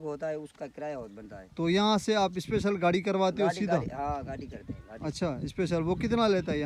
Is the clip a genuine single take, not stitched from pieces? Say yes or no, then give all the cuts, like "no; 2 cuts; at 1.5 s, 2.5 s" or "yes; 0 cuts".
yes; 0 cuts